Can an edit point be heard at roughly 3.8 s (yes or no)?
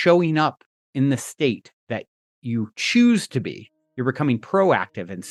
no